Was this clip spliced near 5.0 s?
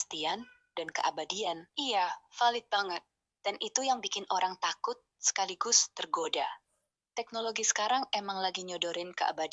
no; 1 cut; at 1.7 s

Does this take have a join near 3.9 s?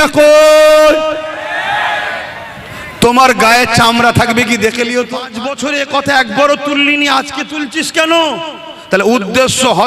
no; 1 cut; at 5.5 s

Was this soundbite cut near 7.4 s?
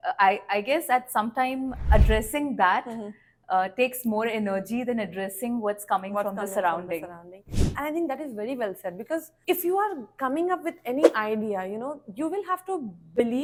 no; 0 cuts

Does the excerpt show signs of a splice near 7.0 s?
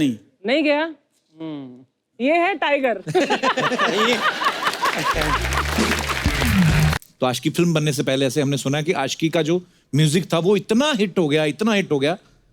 yes; 1 cut; at 7.0 s

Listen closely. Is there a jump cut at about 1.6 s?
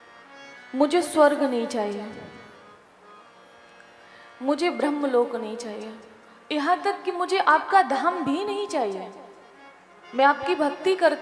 no; 0 cuts

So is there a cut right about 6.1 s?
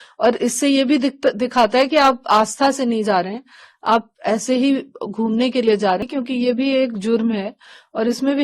yes; 1 cut; at 6.1 s

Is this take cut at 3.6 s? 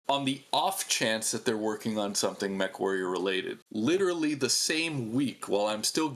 yes; 1 cut; at 3.6 s

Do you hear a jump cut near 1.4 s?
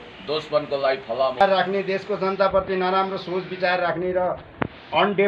yes; 1 cut; at 1.4 s

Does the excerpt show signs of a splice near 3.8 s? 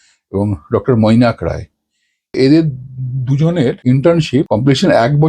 yes; 3 cuts; at 2.3 s, 3.8 s, 4.5 s

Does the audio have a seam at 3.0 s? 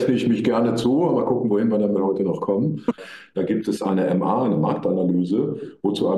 yes; 1 cut; at 3.0 s

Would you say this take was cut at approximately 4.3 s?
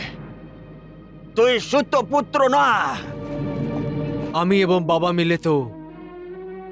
yes; 1 cut; at 4.3 s

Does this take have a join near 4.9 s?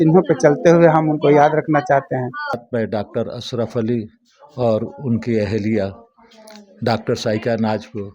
no; 1 cut; at 2.6 s

